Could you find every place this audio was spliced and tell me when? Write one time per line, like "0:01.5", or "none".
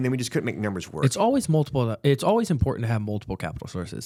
none